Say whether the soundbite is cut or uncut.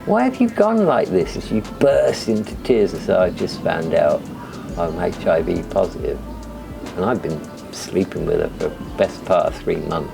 uncut